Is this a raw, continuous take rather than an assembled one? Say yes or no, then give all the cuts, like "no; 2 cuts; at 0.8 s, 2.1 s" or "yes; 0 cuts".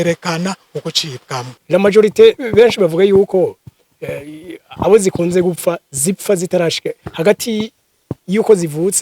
no; 1 cut; at 1.5 s